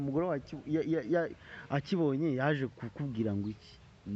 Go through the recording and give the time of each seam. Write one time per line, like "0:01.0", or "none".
none